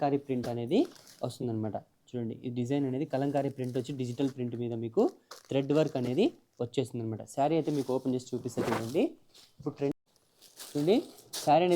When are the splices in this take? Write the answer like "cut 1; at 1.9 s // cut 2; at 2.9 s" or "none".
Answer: cut 1; at 10.0 s